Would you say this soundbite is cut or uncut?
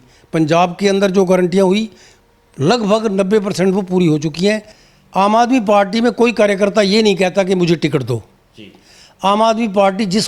cut